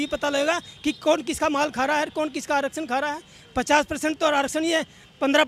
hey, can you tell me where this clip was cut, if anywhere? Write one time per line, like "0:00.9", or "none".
none